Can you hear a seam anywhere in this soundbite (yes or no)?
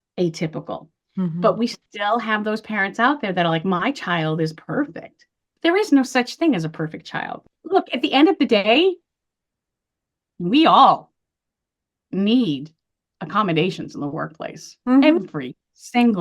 yes